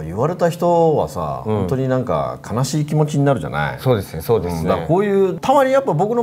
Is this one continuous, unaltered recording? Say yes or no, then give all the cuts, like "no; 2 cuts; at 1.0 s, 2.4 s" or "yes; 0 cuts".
yes; 0 cuts